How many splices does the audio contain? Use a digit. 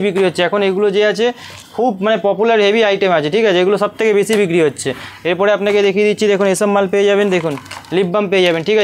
0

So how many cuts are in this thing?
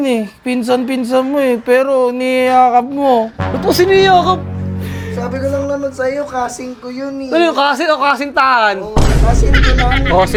0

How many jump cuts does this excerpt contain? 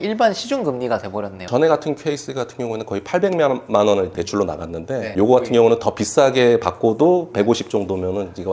2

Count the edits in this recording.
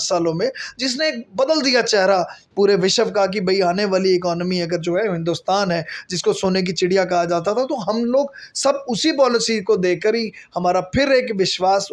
0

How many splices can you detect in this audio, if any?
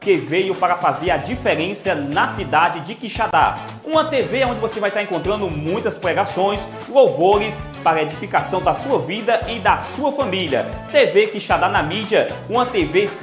0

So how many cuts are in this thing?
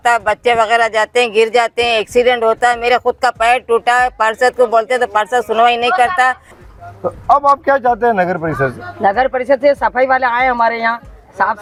0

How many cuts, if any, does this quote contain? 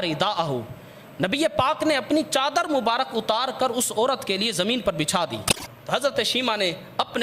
1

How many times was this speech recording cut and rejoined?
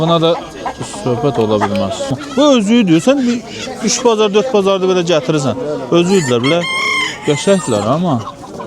1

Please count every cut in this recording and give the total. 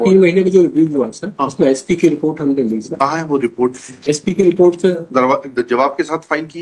0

